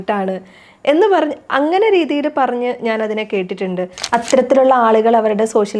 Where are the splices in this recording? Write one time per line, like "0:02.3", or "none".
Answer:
0:04.0